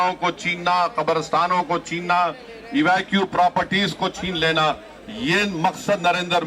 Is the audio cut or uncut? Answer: uncut